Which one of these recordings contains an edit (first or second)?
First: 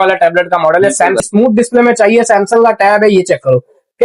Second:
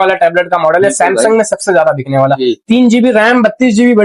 first